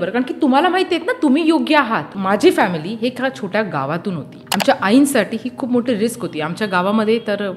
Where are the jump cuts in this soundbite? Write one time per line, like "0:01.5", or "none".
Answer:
0:02.2
0:04.3